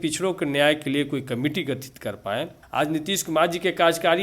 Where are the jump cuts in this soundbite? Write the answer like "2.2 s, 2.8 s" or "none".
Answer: 2.6 s